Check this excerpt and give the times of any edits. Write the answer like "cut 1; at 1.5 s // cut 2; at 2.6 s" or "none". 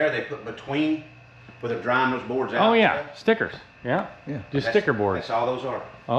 none